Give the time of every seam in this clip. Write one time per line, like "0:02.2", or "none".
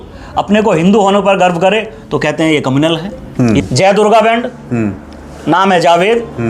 0:03.6